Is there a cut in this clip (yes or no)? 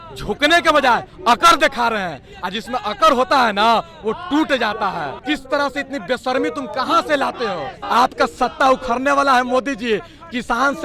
yes